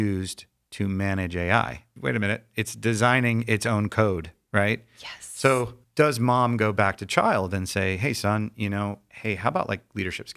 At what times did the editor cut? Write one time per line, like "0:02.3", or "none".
0:01.8
0:05.8
0:09.1